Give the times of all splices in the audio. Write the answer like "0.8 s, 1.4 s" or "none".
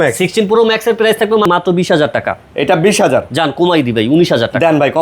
1.5 s